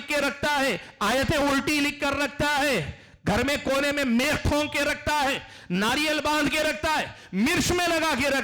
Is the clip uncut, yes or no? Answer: yes